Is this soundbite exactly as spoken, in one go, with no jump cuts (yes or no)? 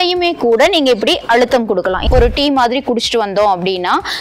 no